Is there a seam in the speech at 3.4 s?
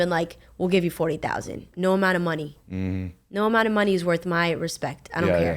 no; 1 cut; at 1.6 s

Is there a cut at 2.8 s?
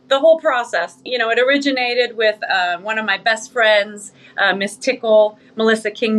no; 1 cut; at 1.0 s

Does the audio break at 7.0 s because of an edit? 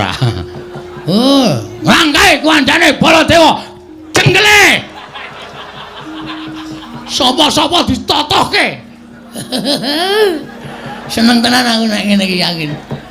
yes; 1 cut; at 7.0 s

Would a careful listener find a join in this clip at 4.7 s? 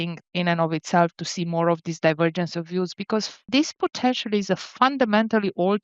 no; 1 cut; at 3.5 s

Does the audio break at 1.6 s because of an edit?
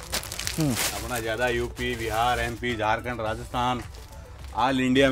no; 0 cuts

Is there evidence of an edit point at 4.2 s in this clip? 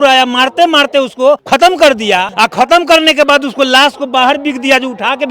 no; 2 cuts; at 1.4 s, 2.3 s

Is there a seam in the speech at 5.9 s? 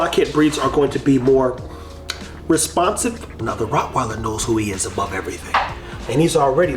yes; 2 cuts; at 3.4 s, 5.9 s

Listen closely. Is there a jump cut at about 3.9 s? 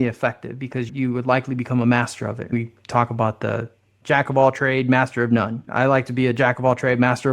yes; 4 cuts; at 0.9 s, 2.5 s, 3.9 s, 5.6 s

